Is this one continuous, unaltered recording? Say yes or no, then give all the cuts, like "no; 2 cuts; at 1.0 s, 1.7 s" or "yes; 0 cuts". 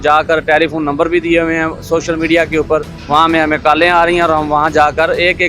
no; 1 cut; at 2.9 s